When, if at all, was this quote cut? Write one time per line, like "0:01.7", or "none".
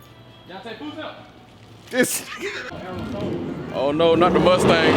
0:02.7

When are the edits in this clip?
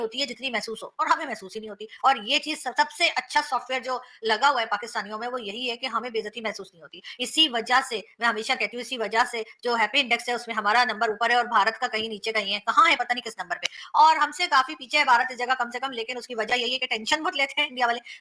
none

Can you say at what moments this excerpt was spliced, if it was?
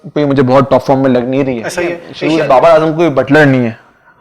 0:02.1

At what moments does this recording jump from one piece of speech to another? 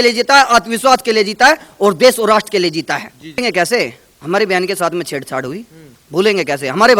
0:03.4

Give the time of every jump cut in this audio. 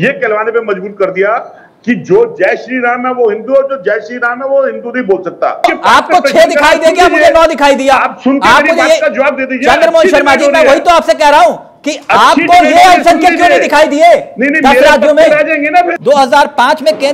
none

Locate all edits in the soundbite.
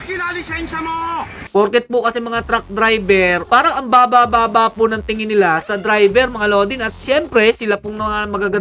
0:01.5
0:03.4

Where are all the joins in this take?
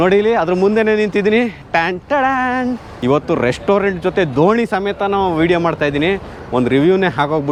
none

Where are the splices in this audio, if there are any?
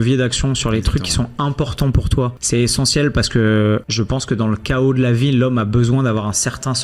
0:02.4
0:03.9

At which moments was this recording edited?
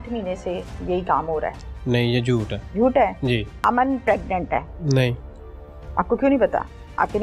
0:02.6
0:03.5
0:04.7

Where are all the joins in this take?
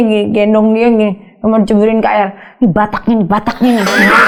none

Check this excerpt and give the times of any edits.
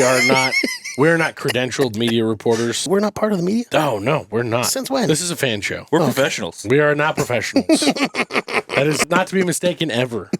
0:02.8
0:09.0

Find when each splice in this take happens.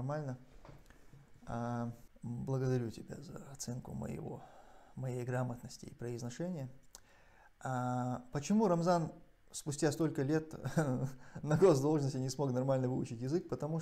0:02.1

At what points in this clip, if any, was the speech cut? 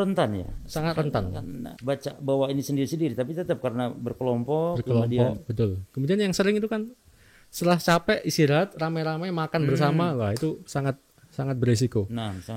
none

